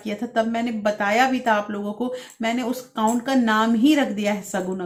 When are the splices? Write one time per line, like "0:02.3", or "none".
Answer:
none

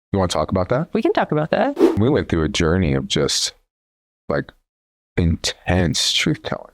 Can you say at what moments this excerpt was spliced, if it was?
0:02.0

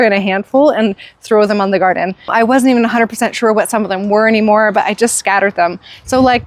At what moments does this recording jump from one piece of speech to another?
0:02.3

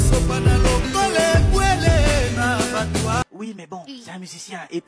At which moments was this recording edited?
0:03.2

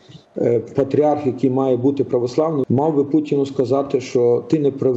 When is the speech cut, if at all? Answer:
0:02.6

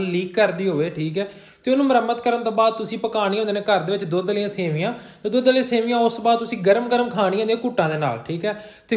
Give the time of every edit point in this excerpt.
none

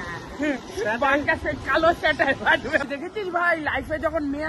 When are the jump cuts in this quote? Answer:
0:02.8

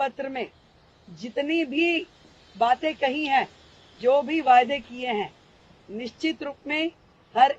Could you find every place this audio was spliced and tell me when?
none

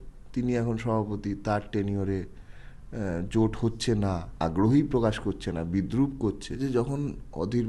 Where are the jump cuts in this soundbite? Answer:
0:04.3
0:06.6

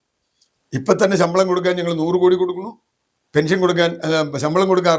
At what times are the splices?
none

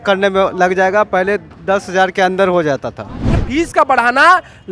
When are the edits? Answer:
0:03.4

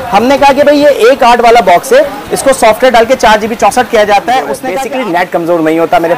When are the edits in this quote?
0:04.7

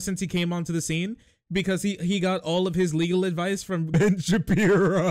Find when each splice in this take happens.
0:03.9

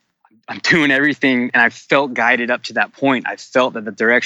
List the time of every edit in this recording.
0:01.5

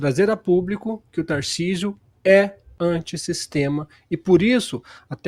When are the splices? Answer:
none

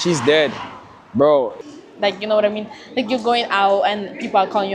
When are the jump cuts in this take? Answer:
0:01.5

